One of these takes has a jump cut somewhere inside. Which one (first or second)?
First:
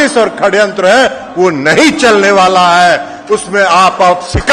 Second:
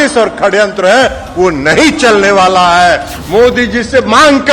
second